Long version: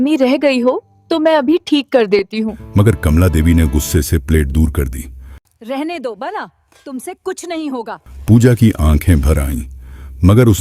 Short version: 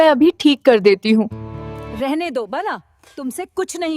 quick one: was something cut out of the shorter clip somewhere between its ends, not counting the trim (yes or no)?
yes